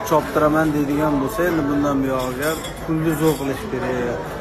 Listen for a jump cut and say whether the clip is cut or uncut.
cut